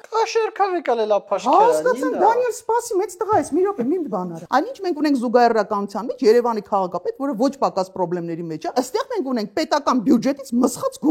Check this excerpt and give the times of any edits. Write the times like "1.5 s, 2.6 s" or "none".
4.3 s, 8.7 s